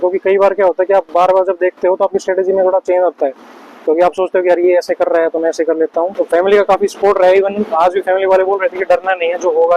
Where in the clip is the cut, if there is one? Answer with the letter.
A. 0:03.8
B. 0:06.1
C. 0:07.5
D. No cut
B